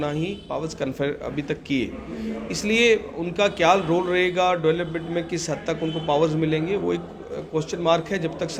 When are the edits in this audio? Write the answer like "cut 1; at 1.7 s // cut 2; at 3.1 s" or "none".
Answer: none